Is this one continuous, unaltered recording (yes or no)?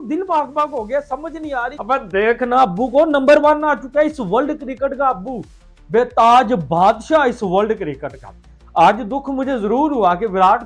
no